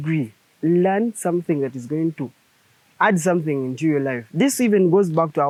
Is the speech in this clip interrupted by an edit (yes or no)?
no